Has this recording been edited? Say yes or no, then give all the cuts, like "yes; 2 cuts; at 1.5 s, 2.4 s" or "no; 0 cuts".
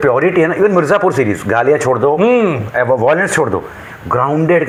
no; 0 cuts